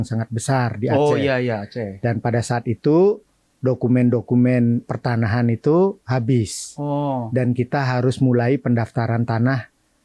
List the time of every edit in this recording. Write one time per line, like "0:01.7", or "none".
none